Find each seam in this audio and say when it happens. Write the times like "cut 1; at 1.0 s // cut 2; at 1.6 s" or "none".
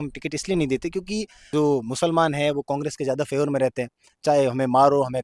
cut 1; at 1.3 s